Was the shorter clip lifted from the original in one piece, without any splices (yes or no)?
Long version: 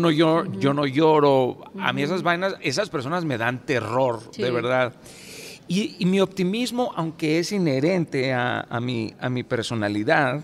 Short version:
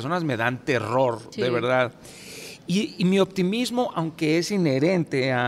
yes